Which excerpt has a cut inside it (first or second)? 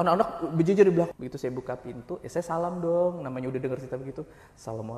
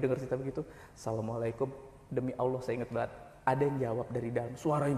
first